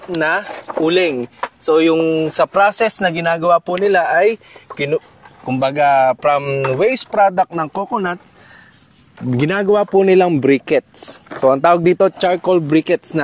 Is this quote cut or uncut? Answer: uncut